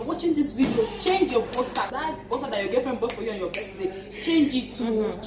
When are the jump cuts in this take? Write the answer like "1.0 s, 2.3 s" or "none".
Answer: 1.9 s